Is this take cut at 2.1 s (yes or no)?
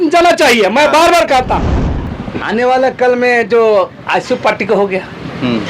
yes